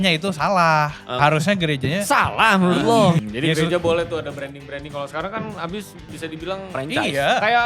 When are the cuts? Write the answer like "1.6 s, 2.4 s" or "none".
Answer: 3.3 s, 6.1 s